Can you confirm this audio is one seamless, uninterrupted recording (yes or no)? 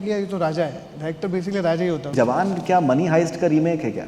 no